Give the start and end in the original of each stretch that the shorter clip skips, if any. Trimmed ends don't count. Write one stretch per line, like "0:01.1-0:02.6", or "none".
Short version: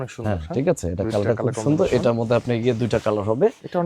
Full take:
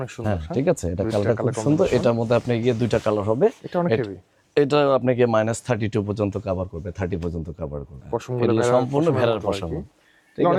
none